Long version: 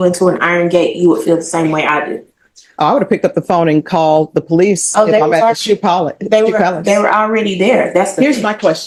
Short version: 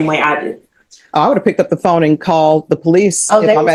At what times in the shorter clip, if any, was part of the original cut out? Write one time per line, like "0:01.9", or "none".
none